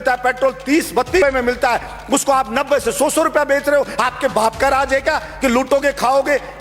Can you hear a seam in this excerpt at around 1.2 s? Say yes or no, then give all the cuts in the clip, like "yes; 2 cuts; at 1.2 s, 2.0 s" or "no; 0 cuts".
yes; 1 cut; at 1.2 s